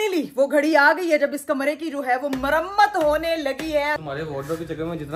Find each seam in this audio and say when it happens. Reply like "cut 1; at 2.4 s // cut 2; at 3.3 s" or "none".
cut 1; at 4.0 s